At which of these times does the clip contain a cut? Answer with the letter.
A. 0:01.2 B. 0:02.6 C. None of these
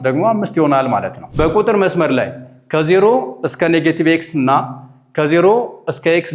A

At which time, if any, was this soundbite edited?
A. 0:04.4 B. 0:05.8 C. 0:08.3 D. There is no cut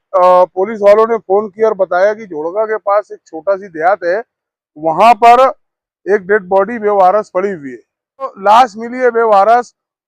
C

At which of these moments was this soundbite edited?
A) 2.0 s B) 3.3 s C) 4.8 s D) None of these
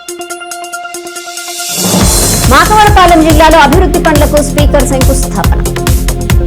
A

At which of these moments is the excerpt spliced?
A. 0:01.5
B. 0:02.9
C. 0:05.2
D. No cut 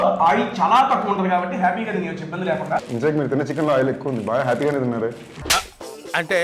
B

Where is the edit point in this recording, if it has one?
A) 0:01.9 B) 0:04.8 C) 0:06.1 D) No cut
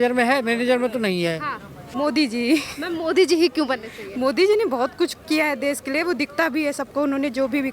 A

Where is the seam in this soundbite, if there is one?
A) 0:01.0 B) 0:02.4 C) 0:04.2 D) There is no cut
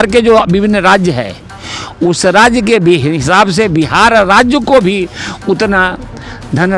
D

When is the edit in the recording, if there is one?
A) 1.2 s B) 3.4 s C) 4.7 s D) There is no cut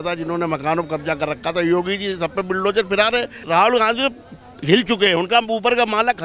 B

